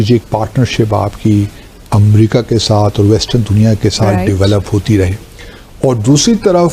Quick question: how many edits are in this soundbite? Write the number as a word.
zero